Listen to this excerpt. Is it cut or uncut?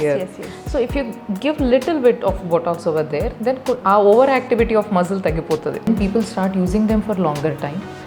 cut